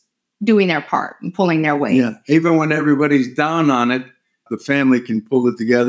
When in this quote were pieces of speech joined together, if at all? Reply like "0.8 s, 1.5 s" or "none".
4.5 s